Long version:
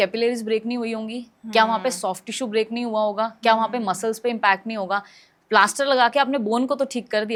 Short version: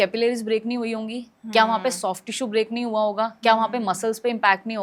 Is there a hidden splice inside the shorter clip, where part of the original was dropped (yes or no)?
no